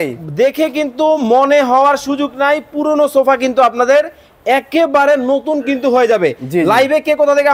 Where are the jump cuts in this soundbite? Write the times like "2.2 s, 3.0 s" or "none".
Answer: none